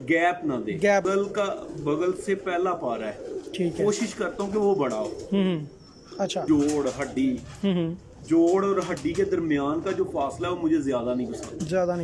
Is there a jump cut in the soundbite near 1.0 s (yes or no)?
yes